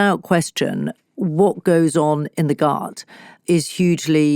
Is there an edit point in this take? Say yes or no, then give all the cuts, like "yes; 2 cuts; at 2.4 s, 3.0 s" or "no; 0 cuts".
yes; 1 cut; at 3.4 s